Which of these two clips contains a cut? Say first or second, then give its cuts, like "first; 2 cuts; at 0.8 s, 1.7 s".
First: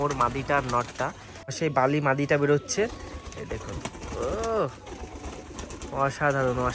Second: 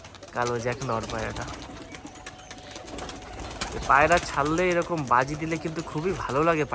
first; 1 cut; at 1.5 s